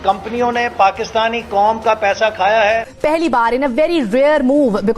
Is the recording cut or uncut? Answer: cut